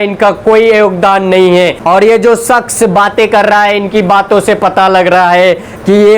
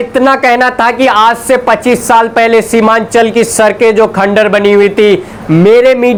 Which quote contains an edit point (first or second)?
first